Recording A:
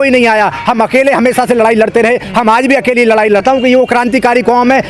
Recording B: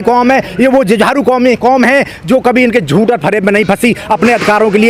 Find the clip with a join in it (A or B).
A